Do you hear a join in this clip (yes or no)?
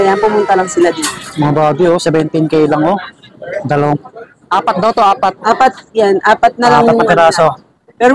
no